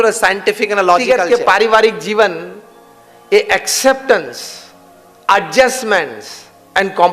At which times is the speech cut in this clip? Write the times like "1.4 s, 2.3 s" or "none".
1.0 s